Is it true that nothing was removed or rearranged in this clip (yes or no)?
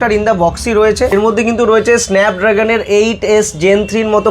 no